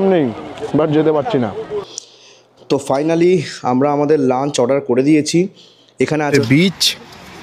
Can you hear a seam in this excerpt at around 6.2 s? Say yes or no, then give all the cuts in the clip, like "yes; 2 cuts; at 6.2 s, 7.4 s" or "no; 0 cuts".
yes; 2 cuts; at 1.6 s, 6.2 s